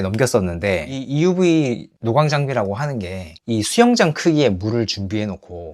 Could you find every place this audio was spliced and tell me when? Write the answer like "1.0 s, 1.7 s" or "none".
0.9 s